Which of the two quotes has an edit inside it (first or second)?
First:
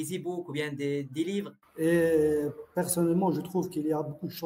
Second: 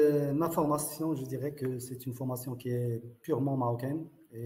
first